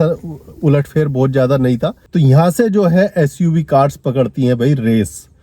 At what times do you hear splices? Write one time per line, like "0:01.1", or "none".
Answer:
0:02.0